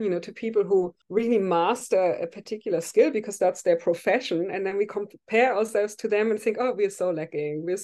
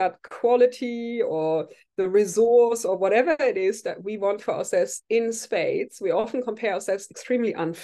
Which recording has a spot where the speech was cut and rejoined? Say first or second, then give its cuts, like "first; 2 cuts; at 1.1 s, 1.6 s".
first; 1 cut; at 1.0 s